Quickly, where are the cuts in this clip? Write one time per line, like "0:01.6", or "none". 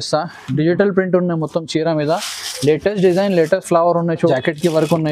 0:04.2